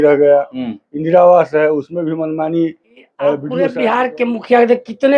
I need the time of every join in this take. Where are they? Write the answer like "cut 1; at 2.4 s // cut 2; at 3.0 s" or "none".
cut 1; at 3.6 s